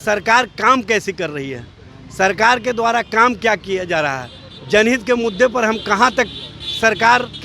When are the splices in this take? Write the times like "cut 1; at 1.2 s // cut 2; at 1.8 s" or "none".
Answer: none

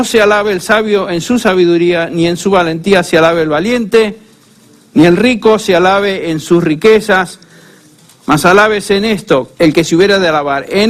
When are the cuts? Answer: cut 1; at 5.9 s

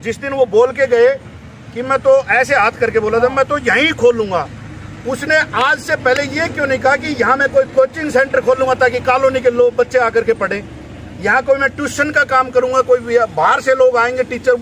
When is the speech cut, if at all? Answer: none

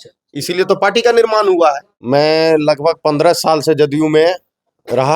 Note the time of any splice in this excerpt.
cut 1; at 1.9 s

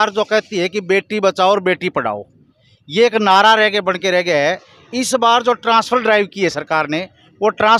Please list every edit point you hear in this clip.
none

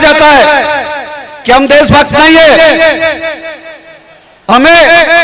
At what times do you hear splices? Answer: none

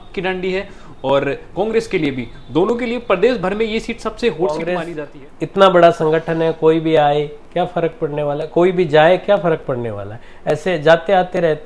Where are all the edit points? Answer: cut 1; at 4.8 s

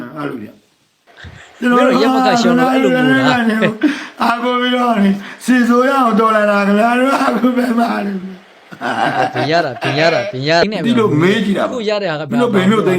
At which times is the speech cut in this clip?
cut 1; at 10.6 s

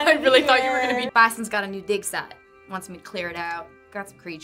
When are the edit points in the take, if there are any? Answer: cut 1; at 1.1 s

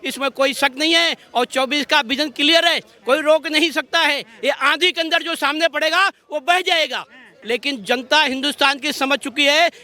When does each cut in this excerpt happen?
cut 1; at 7.3 s

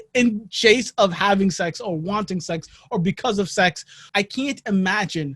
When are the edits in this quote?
cut 1; at 4.0 s

